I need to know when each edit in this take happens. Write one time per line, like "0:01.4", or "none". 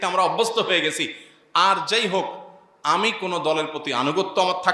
none